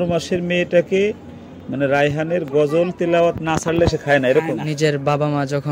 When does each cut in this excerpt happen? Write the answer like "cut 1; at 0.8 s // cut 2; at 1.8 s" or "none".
cut 1; at 4.7 s